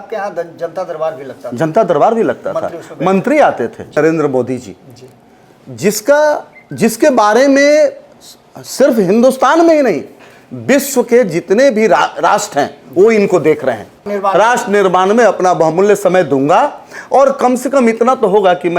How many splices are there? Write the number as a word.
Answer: two